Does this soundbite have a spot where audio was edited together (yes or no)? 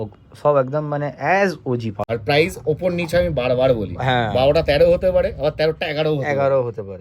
yes